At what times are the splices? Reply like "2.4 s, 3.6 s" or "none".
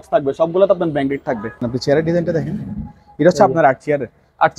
1.6 s